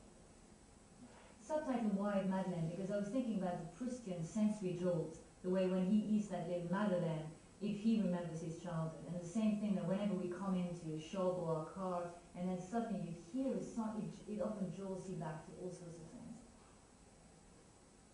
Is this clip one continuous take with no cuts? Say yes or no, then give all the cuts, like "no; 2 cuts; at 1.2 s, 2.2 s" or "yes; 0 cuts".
no; 1 cut; at 8.3 s